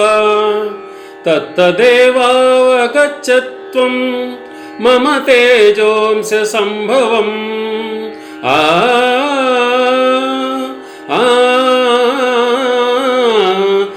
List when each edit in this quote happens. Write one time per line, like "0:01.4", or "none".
none